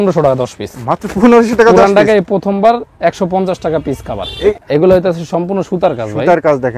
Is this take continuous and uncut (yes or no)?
no